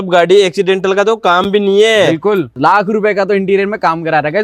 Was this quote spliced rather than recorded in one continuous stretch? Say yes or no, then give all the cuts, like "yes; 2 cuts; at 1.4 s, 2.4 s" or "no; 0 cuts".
yes; 1 cut; at 2.5 s